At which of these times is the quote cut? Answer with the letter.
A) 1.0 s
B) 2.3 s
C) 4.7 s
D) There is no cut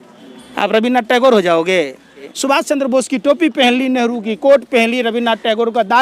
B